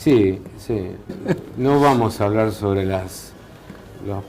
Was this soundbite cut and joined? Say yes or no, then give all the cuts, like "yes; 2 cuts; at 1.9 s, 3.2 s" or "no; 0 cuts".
no; 0 cuts